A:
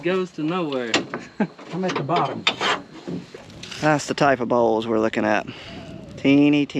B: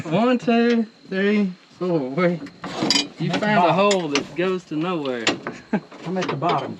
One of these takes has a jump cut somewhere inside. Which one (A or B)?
A